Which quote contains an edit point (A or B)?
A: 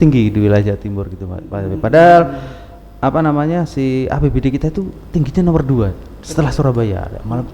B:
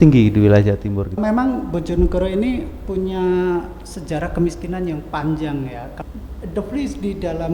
B